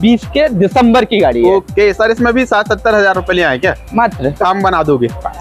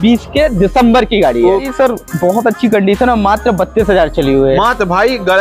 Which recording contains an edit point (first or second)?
second